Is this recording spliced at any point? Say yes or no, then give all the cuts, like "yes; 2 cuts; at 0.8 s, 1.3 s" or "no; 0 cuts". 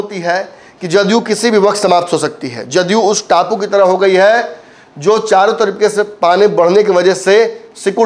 no; 0 cuts